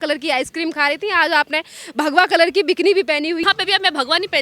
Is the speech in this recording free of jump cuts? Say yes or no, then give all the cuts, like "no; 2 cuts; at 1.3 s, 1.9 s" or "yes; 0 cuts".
no; 1 cut; at 3.4 s